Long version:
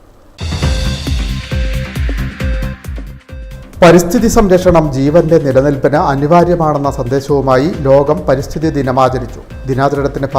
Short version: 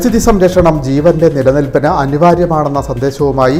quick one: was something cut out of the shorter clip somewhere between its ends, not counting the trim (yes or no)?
no